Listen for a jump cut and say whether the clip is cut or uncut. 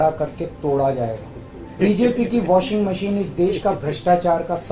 cut